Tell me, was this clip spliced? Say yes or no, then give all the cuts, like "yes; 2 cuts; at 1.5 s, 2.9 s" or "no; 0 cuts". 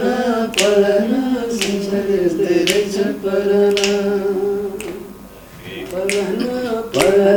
no; 0 cuts